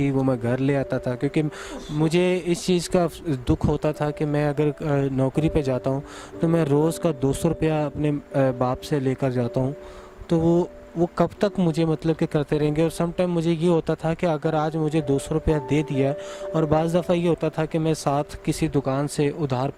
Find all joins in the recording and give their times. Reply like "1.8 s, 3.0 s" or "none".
none